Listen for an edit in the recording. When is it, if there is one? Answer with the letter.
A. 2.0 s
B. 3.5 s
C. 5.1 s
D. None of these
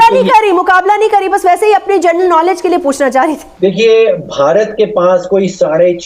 B